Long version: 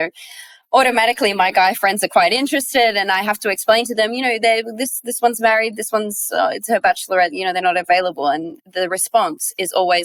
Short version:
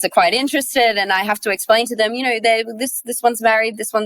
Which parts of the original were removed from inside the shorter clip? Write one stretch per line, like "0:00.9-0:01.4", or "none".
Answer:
none

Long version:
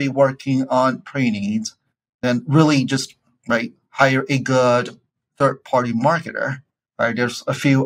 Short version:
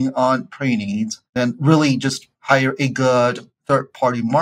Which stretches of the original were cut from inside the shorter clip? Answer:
0:01.7-0:02.1
0:03.2-0:03.8
0:05.0-0:05.2

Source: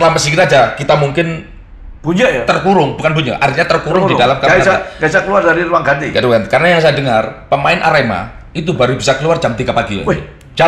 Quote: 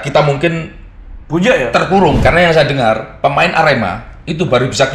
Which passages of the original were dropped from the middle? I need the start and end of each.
0:02.9-0:06.5

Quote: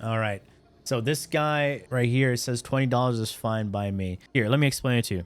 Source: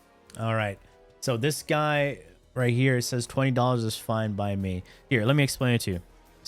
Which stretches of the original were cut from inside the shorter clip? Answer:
0:02.2-0:02.5
0:04.8-0:04.9

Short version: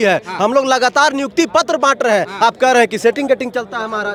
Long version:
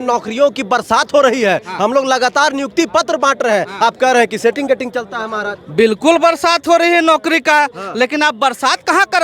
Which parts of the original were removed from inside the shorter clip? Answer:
none

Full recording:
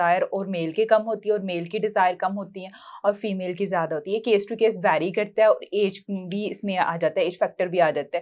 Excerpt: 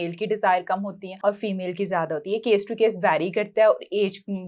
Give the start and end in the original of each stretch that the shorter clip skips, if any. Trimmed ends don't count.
0:02.6-0:02.8

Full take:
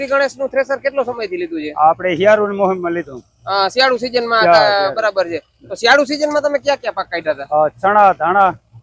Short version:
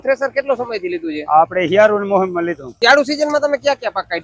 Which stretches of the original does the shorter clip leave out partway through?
0:03.1-0:05.7

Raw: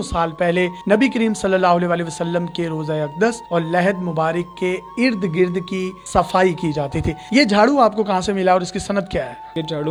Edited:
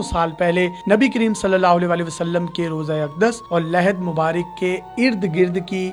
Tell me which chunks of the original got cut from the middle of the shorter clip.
none

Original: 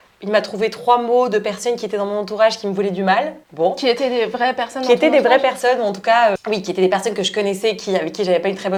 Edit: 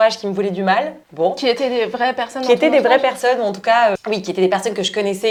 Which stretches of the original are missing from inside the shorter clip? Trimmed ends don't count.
none

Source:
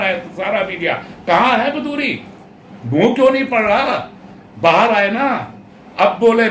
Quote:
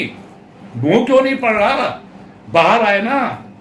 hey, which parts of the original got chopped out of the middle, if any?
none

